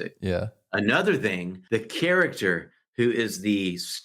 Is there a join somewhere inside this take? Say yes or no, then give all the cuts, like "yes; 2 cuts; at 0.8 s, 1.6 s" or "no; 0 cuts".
yes; 1 cut; at 1.5 s